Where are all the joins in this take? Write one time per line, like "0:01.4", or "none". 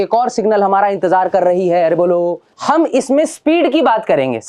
0:02.5